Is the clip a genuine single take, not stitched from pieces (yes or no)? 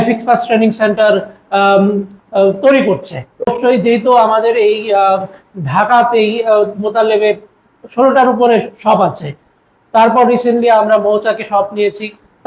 yes